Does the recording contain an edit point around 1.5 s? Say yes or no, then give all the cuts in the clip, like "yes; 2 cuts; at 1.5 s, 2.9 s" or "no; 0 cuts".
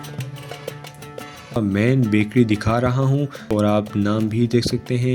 no; 0 cuts